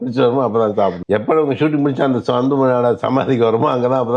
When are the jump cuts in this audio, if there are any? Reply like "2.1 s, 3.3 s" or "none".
1.0 s